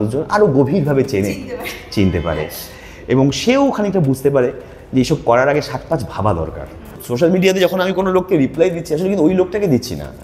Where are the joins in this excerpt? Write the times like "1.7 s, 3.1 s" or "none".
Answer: 7.0 s